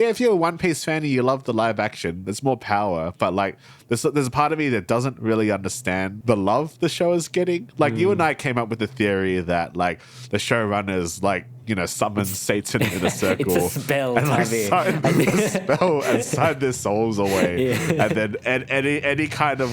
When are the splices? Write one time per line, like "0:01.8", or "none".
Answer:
0:06.1